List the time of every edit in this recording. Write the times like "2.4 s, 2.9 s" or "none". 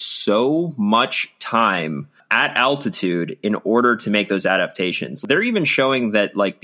2.2 s, 5.2 s